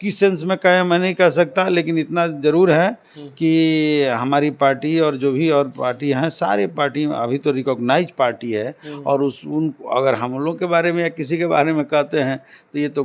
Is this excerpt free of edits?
yes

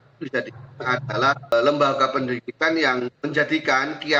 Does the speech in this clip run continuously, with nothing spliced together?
no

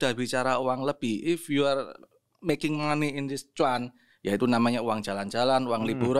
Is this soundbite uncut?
yes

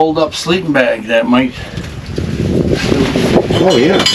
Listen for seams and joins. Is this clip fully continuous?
yes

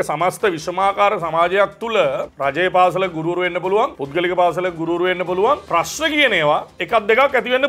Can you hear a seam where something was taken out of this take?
yes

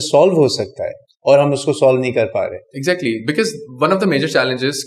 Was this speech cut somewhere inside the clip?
no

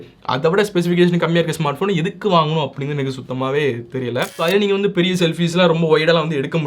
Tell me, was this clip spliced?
yes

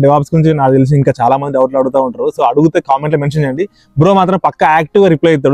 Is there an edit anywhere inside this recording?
no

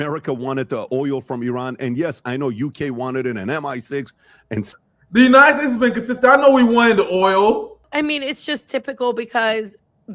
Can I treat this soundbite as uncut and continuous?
no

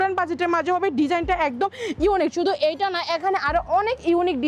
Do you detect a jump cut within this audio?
no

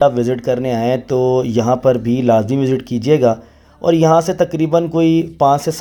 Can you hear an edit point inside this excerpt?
no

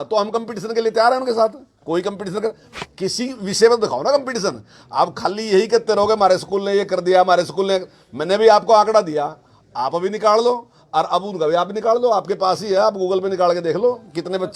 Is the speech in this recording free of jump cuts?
yes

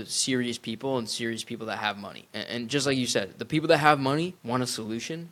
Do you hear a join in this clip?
yes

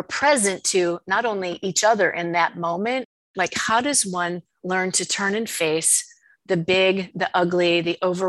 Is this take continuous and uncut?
no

